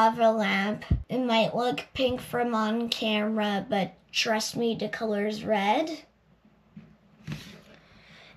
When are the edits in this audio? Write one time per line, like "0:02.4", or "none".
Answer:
0:00.9